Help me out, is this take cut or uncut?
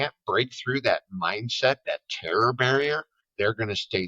cut